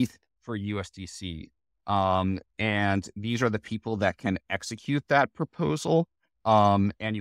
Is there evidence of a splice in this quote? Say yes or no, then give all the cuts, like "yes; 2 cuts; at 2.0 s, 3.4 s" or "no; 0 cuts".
no; 0 cuts